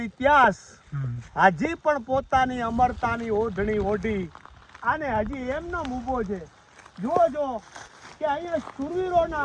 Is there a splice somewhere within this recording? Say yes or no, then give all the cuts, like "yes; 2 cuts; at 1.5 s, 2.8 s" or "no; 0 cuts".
no; 0 cuts